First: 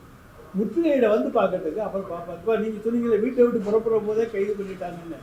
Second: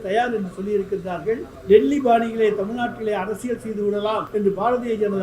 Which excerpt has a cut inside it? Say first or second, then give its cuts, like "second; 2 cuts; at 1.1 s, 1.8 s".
second; 2 cuts; at 1.5 s, 4.3 s